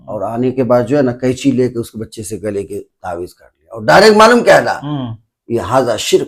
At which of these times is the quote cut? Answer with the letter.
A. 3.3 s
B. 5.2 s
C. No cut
C